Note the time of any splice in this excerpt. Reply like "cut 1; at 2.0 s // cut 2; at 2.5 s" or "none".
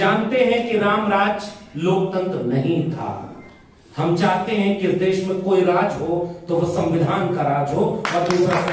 none